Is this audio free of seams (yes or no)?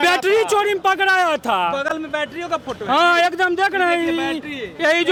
yes